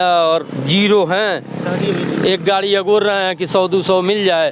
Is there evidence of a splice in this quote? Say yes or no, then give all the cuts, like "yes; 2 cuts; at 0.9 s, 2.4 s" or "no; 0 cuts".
no; 0 cuts